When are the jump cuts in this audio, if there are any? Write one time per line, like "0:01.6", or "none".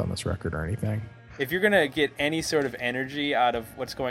0:01.1